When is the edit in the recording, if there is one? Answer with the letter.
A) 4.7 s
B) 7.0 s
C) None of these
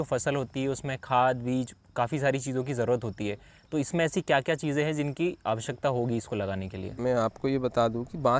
C